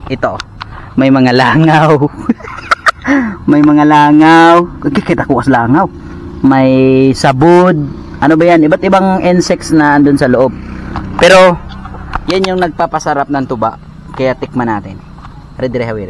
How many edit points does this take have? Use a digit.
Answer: 0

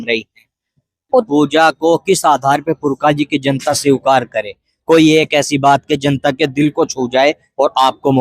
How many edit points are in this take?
1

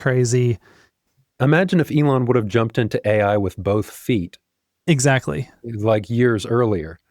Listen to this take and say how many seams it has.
1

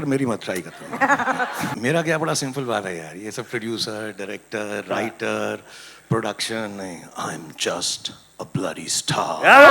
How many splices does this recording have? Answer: 1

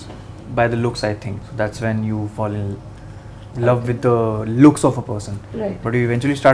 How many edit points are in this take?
1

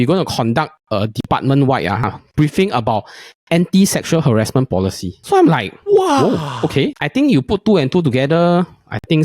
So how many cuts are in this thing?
2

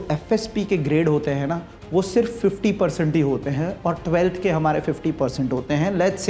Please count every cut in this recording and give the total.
0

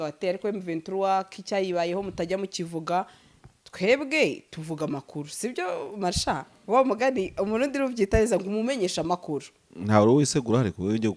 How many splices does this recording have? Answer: 0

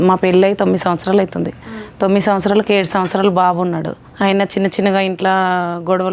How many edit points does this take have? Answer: 1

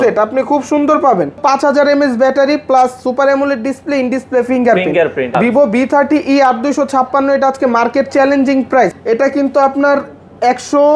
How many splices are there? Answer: 3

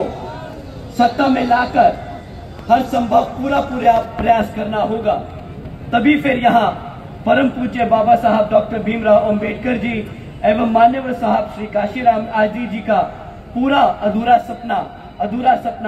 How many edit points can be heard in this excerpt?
0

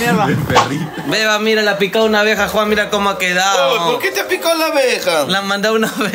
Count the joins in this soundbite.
1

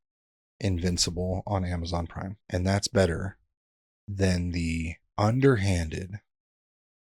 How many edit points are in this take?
2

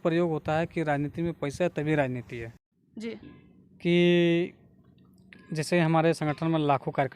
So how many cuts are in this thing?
1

